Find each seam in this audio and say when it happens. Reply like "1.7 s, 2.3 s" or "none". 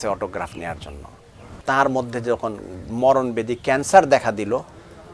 1.5 s